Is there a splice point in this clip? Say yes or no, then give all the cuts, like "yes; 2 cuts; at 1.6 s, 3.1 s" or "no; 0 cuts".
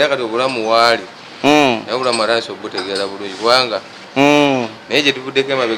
yes; 1 cut; at 4.0 s